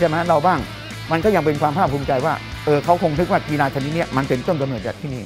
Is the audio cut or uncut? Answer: uncut